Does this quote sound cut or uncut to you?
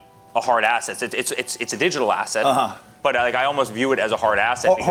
uncut